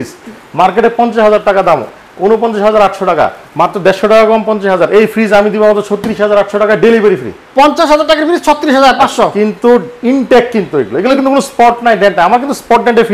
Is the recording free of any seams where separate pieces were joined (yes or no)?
yes